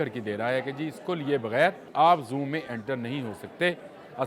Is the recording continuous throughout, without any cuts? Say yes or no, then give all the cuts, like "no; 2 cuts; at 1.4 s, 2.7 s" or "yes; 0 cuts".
no; 1 cut; at 1.8 s